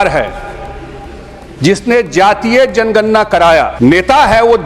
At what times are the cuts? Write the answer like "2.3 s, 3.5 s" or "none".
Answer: 3.7 s